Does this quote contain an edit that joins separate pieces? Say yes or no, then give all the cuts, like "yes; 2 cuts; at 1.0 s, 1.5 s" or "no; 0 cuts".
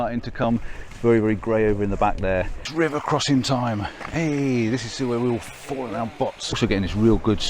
yes; 2 cuts; at 2.7 s, 6.6 s